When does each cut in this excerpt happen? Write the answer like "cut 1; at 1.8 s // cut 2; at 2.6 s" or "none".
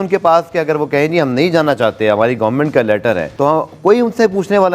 none